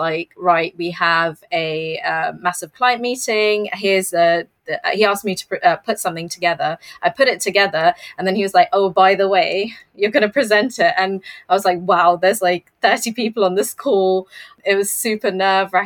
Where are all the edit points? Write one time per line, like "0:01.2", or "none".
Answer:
0:14.5